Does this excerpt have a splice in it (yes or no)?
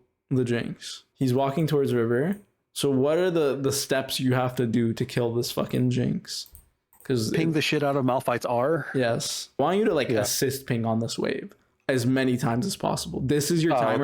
yes